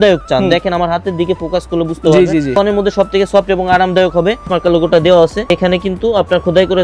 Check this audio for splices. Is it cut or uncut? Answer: cut